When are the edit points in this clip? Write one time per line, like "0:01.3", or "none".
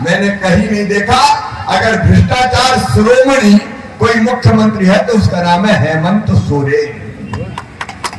none